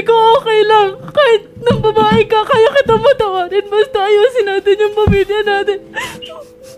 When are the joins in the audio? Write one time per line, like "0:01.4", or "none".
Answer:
none